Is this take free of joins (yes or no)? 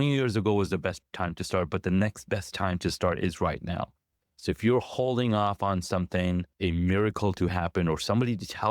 no